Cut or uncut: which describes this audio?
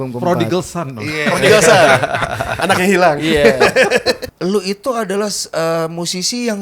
cut